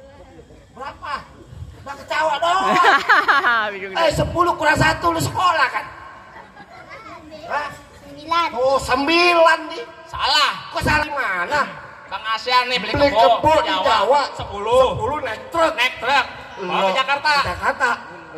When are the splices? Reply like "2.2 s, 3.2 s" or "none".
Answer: 11.1 s